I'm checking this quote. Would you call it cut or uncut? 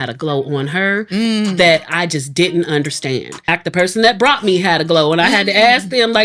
cut